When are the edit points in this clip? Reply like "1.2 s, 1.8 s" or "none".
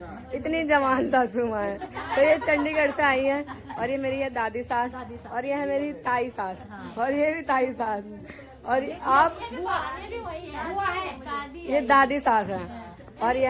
none